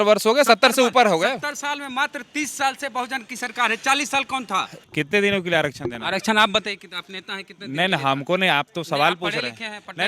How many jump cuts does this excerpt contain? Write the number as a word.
one